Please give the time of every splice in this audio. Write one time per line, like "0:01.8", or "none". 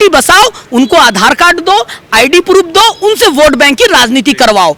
none